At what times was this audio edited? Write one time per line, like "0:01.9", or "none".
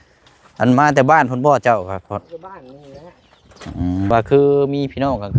0:04.1